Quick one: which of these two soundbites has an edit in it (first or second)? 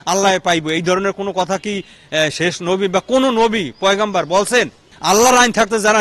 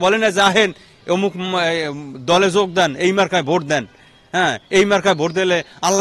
first